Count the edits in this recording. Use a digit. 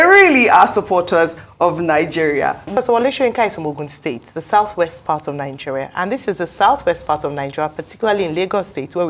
1